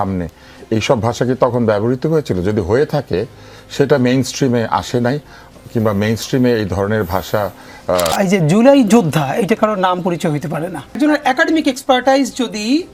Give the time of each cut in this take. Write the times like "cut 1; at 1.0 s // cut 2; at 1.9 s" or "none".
cut 1; at 8.1 s // cut 2; at 11.0 s